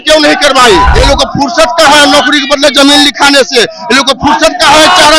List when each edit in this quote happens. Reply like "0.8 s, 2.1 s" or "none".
0.9 s